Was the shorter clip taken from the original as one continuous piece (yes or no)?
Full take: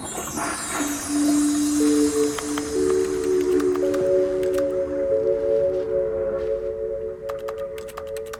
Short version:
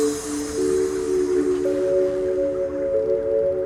yes